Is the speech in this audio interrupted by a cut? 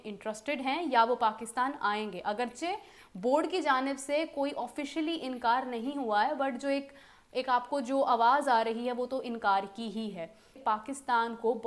no; 0 cuts

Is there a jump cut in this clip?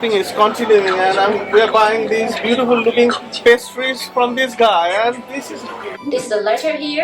yes; 1 cut; at 5.9 s

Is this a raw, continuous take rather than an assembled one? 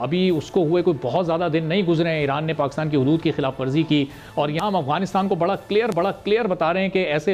yes; 0 cuts

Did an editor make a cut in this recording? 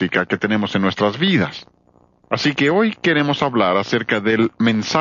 no; 0 cuts

